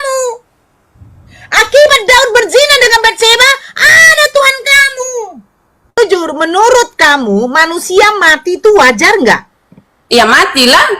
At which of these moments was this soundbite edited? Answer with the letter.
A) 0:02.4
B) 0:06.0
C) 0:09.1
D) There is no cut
B